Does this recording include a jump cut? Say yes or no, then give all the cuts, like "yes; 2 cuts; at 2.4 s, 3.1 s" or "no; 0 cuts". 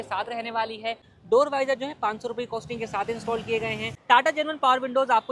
yes; 2 cuts; at 1.1 s, 3.9 s